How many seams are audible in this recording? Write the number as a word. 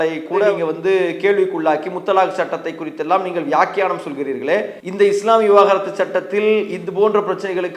one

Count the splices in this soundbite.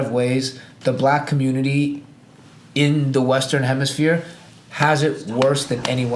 zero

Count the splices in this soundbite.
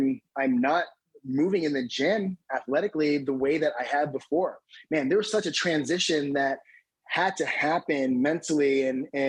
zero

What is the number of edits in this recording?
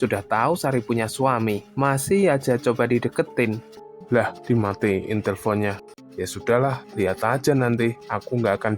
two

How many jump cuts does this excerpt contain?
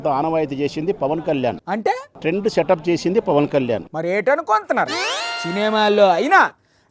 zero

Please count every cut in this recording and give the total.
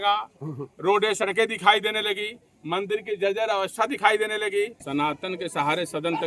one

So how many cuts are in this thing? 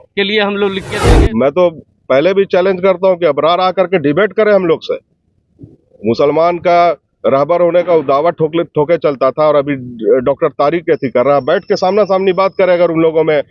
one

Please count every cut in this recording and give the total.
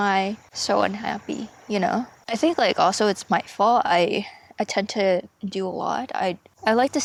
zero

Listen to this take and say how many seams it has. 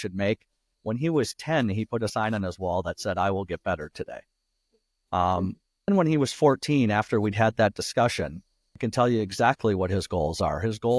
two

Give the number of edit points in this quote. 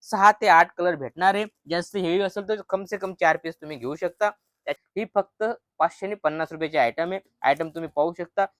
one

